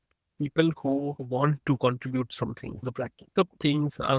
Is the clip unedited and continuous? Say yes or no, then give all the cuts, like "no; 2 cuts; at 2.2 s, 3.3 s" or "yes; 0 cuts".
no; 2 cuts; at 1.2 s, 3.3 s